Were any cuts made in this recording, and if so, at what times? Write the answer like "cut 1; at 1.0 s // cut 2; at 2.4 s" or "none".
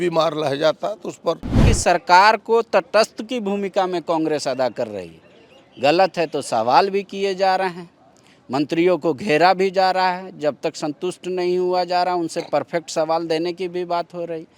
cut 1; at 1.7 s